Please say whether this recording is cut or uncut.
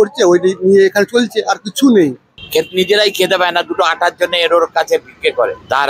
cut